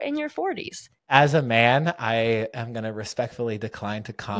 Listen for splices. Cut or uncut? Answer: cut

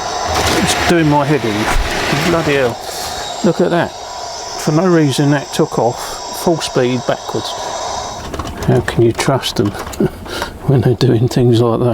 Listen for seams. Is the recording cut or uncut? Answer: cut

